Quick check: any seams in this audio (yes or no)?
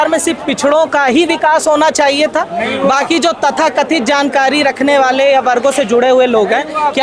no